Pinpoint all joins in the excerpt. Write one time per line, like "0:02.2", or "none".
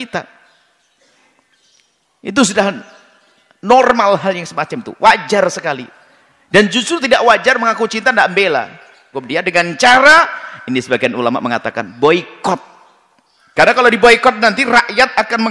0:09.1